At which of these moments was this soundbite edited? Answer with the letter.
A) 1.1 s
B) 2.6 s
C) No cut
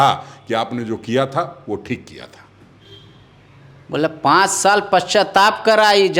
C